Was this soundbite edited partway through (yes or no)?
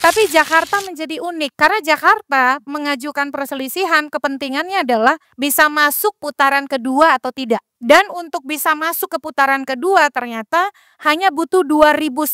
yes